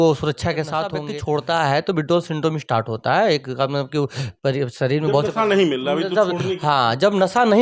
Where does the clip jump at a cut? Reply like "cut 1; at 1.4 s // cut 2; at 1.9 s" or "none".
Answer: cut 1; at 1.0 s